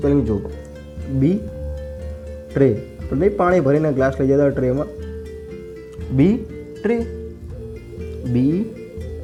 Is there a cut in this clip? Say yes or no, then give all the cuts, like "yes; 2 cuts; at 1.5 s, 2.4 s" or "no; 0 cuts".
no; 0 cuts